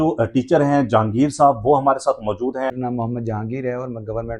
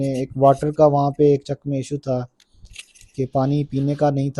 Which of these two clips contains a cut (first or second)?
first